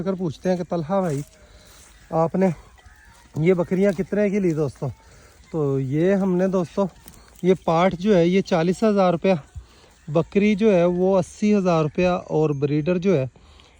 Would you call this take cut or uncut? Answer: uncut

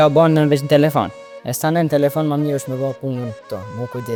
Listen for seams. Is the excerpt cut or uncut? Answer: uncut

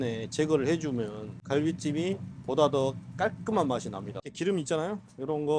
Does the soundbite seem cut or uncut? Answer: cut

